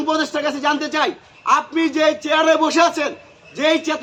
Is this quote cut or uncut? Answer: uncut